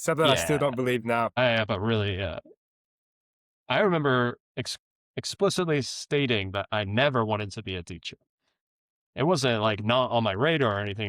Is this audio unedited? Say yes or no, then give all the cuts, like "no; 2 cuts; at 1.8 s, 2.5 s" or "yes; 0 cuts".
no; 1 cut; at 1.4 s